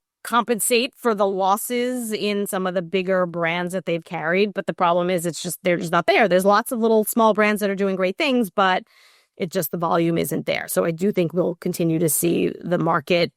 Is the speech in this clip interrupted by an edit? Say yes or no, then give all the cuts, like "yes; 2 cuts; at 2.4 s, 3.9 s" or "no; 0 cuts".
no; 0 cuts